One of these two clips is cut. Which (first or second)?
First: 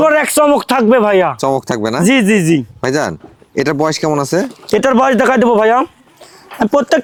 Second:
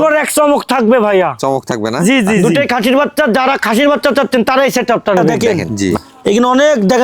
second